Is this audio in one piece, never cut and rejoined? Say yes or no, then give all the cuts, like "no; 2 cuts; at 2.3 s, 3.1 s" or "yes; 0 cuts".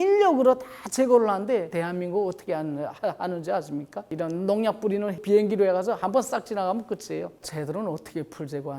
no; 4 cuts; at 1.7 s, 4.1 s, 5.2 s, 7.3 s